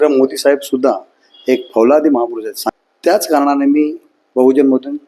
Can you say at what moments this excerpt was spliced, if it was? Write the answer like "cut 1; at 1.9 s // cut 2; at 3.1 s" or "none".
cut 1; at 2.5 s

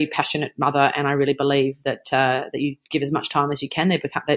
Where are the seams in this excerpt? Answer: none

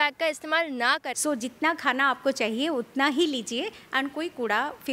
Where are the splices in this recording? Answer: cut 1; at 1.1 s

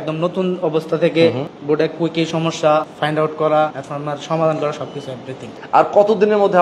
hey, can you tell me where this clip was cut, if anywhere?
cut 1; at 1.5 s // cut 2; at 2.9 s // cut 3; at 3.8 s // cut 4; at 5.5 s

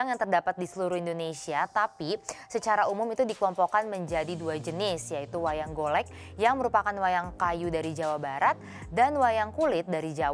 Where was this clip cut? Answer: none

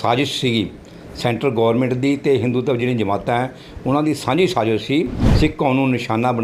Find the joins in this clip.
cut 1; at 5.2 s

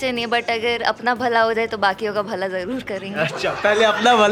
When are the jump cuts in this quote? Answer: none

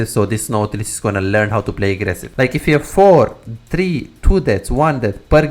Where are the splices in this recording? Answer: cut 1; at 2.2 s

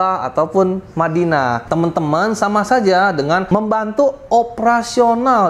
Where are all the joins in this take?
cut 1; at 1.6 s // cut 2; at 3.4 s

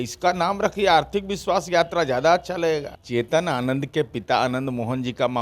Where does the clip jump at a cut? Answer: cut 1; at 3.0 s

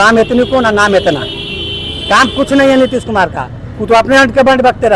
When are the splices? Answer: none

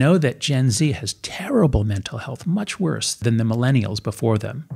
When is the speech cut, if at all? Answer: cut 1; at 3.2 s

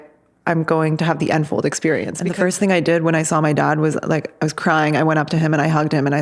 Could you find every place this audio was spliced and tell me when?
cut 1; at 2.1 s

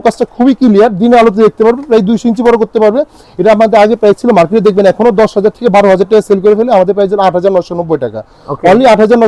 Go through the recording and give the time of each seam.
none

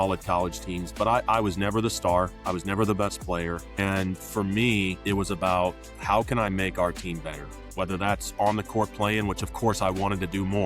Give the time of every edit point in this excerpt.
cut 1; at 2.4 s // cut 2; at 3.7 s // cut 3; at 5.0 s

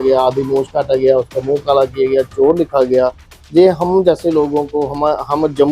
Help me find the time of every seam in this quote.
none

